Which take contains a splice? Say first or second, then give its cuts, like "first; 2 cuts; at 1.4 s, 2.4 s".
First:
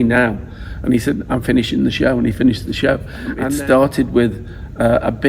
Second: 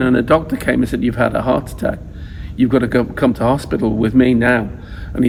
first; 1 cut; at 3.3 s